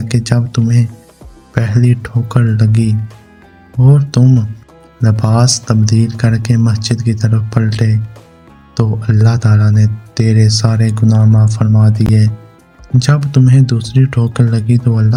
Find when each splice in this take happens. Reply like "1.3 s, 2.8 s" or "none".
none